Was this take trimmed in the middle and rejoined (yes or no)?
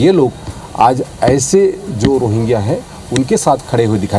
no